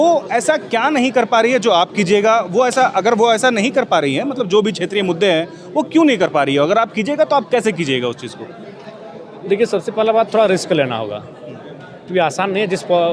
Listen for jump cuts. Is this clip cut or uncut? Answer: uncut